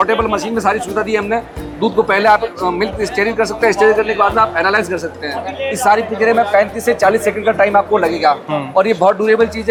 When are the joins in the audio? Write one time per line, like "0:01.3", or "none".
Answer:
none